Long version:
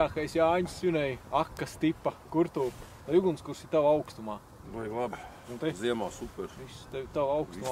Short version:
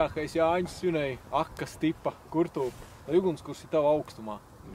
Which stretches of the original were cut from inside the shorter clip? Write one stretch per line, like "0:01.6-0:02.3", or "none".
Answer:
none